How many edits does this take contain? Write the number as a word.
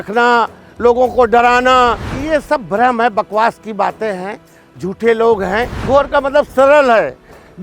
two